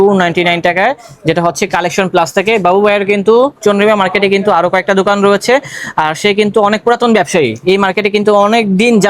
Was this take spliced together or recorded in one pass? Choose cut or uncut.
uncut